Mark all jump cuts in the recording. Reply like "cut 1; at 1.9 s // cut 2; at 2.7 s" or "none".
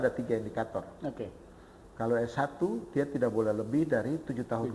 none